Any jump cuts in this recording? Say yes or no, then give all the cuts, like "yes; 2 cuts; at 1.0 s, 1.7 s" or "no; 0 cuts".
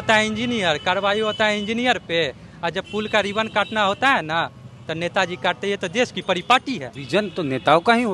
yes; 1 cut; at 7.0 s